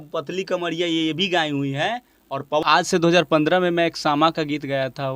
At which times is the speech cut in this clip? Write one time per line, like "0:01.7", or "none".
0:02.6